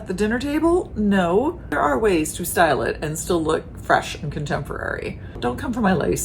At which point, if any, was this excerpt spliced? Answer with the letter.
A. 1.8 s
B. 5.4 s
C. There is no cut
B